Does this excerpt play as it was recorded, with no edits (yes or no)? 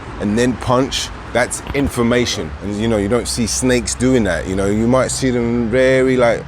no